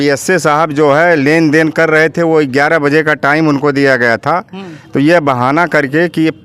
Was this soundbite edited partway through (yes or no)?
no